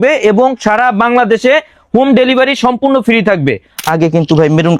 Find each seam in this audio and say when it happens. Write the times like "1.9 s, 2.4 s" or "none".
3.8 s